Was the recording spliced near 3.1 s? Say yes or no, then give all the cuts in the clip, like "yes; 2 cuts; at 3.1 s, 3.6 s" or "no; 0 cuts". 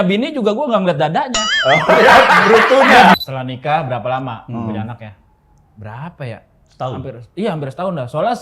yes; 1 cut; at 3.1 s